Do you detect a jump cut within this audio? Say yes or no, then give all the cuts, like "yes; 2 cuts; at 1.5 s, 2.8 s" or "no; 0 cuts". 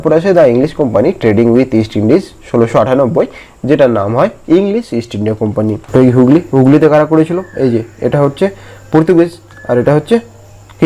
yes; 1 cut; at 5.8 s